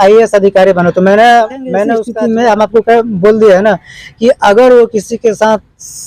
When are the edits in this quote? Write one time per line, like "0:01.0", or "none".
0:02.0